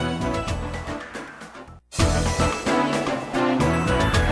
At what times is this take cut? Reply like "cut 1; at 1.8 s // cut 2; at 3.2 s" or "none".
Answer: cut 1; at 1.8 s // cut 2; at 3.2 s